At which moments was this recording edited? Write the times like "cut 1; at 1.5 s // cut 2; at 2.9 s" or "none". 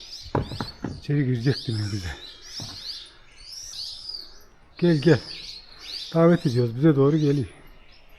cut 1; at 3.7 s